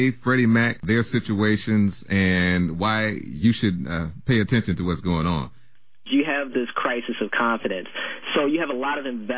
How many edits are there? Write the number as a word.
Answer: one